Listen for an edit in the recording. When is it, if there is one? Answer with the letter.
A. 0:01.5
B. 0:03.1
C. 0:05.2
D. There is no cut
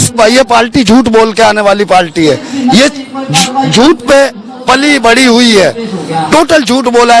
D